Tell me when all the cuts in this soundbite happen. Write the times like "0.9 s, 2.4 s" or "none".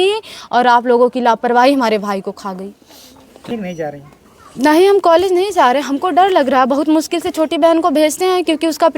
3.5 s